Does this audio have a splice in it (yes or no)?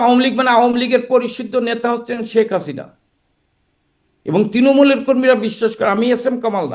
no